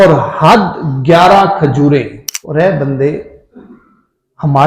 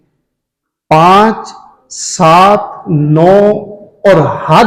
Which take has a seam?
first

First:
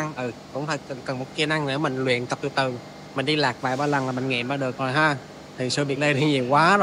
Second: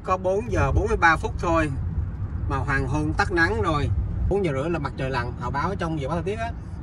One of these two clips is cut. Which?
second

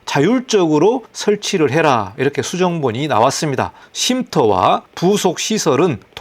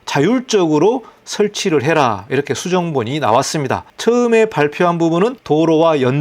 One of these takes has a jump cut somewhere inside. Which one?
first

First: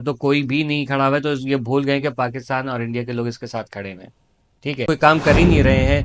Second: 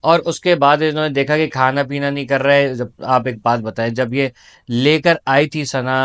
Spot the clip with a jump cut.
first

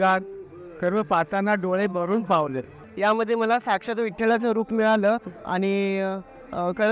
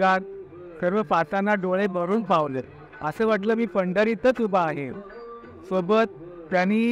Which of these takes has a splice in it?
first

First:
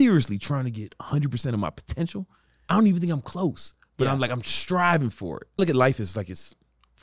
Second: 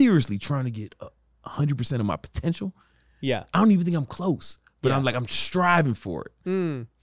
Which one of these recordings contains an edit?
first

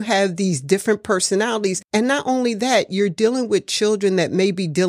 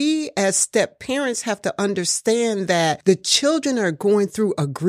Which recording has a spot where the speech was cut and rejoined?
first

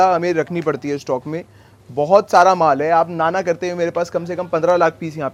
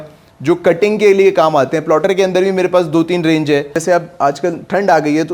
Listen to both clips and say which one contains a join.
second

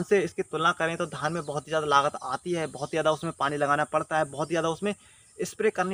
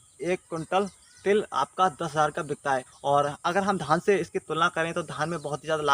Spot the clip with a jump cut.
second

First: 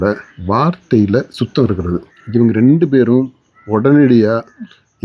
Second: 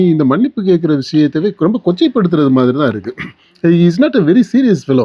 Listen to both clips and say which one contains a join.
first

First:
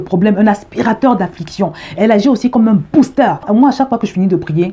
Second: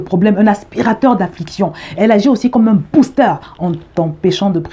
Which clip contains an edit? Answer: second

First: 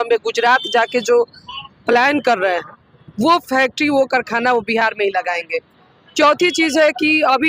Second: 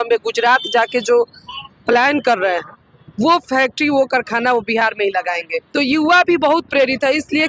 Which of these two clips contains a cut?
second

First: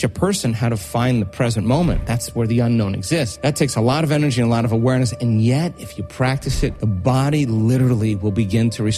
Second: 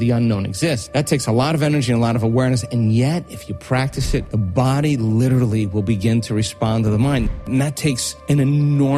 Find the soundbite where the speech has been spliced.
second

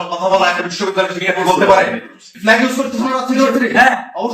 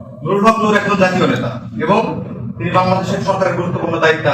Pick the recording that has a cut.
first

